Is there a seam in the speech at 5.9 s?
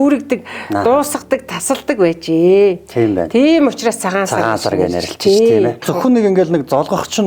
yes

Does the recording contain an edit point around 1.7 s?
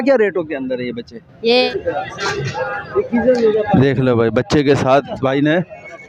yes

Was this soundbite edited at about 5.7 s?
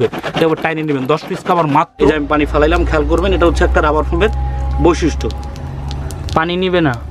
no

